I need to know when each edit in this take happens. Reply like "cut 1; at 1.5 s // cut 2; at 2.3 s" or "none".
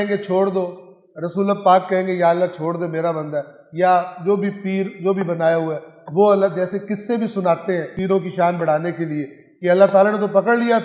cut 1; at 8.0 s